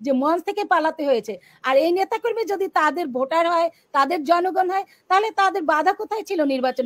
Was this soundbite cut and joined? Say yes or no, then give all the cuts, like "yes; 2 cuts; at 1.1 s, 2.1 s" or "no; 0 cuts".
no; 0 cuts